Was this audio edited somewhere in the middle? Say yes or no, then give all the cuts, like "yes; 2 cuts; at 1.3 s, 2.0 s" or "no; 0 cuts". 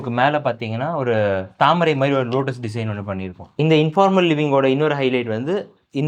yes; 1 cut; at 3.4 s